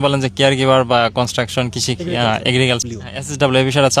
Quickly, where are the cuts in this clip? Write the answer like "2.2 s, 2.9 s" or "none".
2.8 s